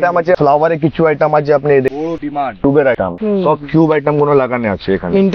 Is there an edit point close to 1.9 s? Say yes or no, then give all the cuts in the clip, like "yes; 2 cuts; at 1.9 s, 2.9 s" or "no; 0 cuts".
yes; 1 cut; at 1.9 s